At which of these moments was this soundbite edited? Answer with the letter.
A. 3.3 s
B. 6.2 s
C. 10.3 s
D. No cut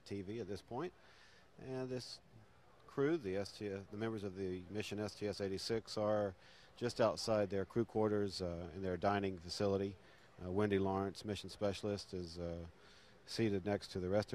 A